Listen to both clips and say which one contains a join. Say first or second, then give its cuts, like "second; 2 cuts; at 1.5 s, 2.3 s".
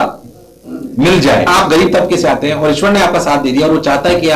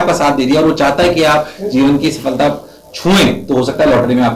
first; 1 cut; at 1.5 s